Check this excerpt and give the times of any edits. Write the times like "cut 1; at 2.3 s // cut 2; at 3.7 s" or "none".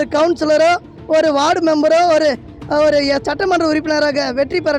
none